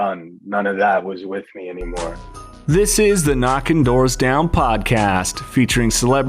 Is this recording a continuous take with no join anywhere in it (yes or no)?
no